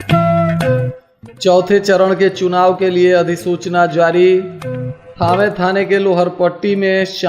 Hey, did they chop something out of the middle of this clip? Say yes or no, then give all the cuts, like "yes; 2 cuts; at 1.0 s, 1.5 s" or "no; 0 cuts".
yes; 1 cut; at 0.9 s